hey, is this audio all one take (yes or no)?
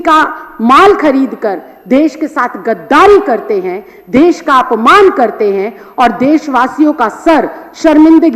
yes